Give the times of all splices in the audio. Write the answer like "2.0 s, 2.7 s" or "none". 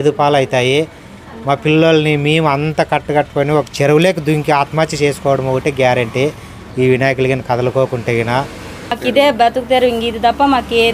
8.5 s